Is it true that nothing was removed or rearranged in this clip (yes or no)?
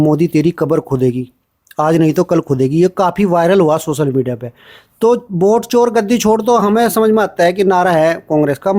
yes